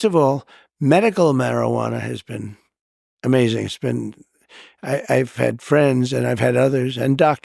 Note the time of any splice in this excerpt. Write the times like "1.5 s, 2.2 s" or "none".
none